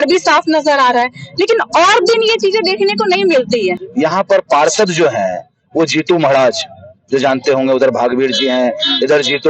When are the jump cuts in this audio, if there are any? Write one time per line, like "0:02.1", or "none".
0:03.8